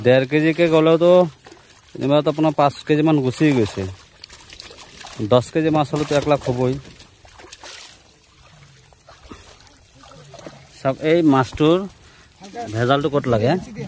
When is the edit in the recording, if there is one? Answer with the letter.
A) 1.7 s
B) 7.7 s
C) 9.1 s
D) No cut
B